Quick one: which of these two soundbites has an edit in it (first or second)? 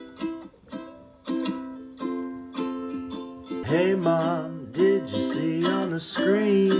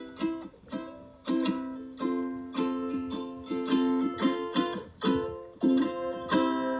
first